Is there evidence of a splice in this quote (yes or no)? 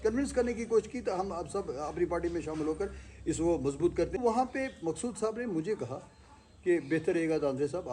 yes